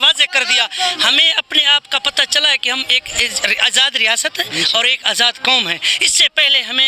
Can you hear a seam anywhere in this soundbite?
no; 0 cuts

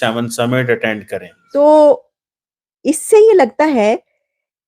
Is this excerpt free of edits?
no; 1 cut; at 1.4 s

